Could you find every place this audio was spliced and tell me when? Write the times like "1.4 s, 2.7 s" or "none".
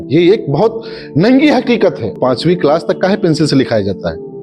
2.2 s